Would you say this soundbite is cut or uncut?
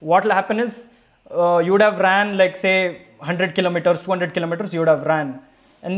uncut